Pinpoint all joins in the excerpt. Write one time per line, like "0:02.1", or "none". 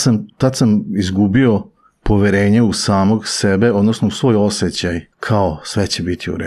0:05.1